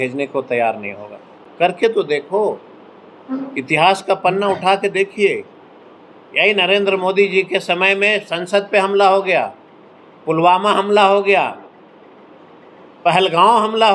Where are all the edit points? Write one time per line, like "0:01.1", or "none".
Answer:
none